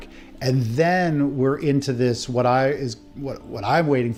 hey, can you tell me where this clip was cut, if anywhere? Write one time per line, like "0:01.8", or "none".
none